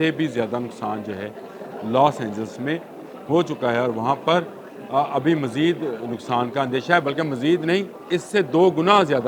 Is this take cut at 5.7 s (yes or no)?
no